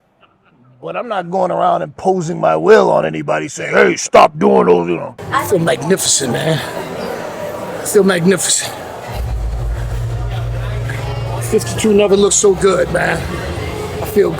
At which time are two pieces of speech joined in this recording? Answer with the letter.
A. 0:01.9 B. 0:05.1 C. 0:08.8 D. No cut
B